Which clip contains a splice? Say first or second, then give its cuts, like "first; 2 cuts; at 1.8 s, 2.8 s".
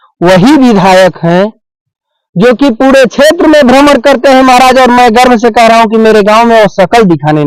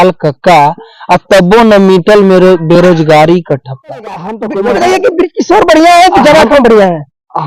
second; 1 cut; at 4.4 s